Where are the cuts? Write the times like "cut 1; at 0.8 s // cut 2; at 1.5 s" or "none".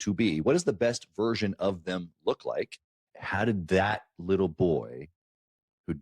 cut 1; at 3.0 s

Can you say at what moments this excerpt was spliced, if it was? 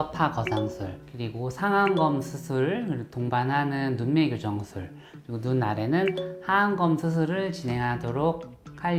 none

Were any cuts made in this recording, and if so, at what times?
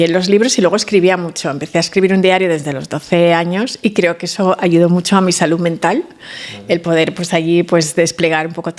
none

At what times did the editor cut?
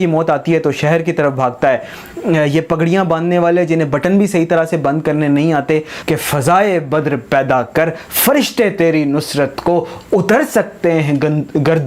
cut 1; at 2.0 s // cut 2; at 5.9 s

